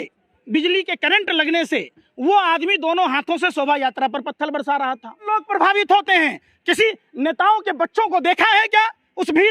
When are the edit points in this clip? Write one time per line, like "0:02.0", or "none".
0:05.2